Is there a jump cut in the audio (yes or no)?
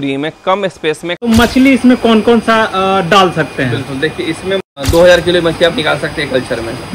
yes